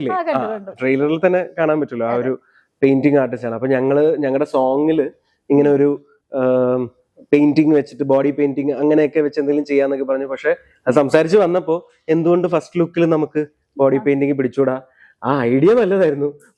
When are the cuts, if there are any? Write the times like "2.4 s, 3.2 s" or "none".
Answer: none